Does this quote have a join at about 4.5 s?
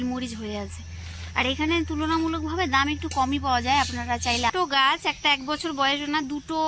yes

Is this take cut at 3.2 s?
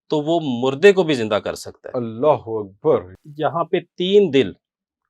yes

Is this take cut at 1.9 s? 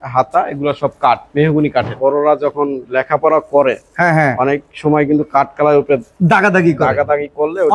yes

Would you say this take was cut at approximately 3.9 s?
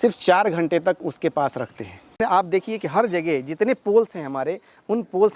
no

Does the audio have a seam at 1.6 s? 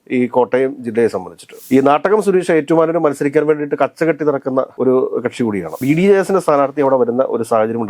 yes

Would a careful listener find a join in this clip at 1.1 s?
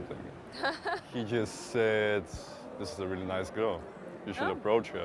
yes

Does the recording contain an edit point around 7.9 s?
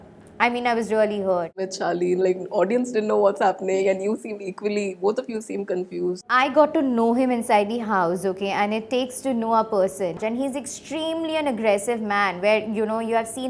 no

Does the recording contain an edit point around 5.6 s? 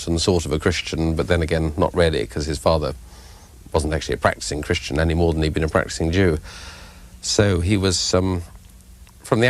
no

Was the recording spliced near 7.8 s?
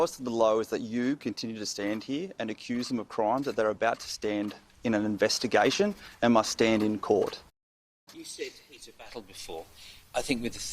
yes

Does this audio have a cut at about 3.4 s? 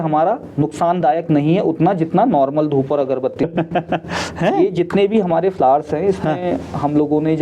yes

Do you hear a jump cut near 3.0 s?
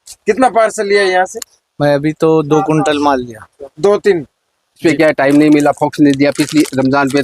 no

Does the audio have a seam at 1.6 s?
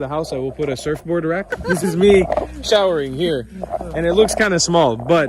yes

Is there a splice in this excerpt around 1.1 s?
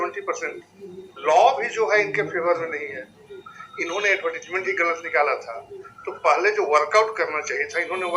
yes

